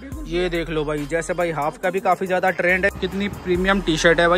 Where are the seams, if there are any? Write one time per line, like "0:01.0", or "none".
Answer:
0:02.9